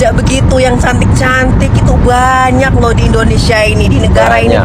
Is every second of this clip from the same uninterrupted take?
yes; 0 cuts

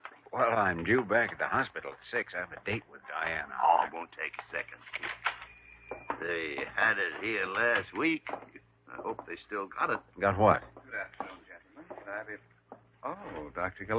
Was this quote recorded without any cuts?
yes; 0 cuts

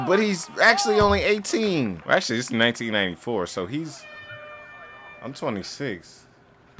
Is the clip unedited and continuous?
no; 1 cut; at 2.0 s

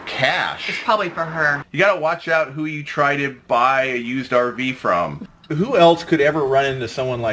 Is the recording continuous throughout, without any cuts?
no; 2 cuts; at 1.6 s, 5.2 s

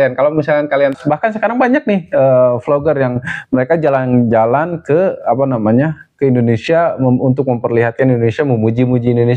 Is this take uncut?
no; 1 cut; at 1.0 s

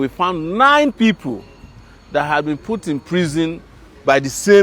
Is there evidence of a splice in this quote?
no; 0 cuts

